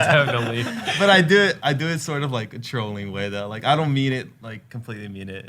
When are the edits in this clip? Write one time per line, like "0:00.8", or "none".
0:04.4